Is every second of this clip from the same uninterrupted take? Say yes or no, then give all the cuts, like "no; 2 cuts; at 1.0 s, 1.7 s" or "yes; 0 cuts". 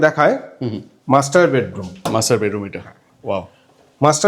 yes; 0 cuts